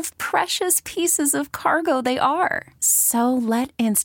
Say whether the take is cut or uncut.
uncut